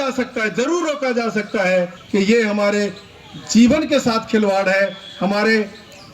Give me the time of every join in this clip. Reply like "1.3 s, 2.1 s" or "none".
2.0 s